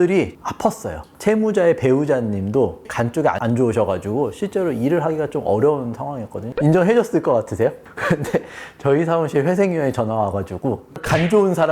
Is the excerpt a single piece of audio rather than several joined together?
no; 4 cuts; at 1.1 s, 2.8 s, 6.5 s, 7.9 s

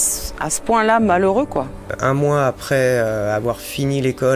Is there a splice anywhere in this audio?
yes; 1 cut; at 1.9 s

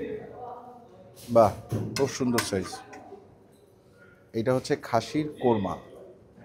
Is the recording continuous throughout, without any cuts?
yes; 0 cuts

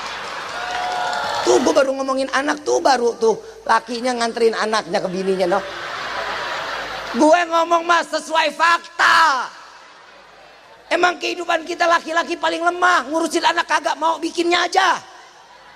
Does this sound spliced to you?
yes; 1 cut; at 1.4 s

